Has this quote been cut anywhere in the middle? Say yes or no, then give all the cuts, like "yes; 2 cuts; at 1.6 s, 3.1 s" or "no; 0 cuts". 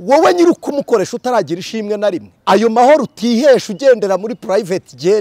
yes; 1 cut; at 2.3 s